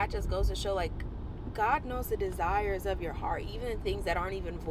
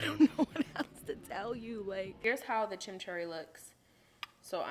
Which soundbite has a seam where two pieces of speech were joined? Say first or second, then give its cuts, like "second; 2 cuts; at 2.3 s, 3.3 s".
second; 1 cut; at 2.2 s